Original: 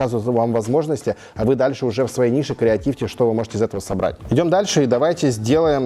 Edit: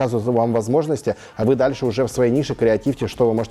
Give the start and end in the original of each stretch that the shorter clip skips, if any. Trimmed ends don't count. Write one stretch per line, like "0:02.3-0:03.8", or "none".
none